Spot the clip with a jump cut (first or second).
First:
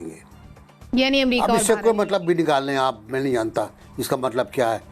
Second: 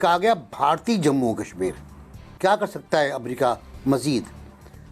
second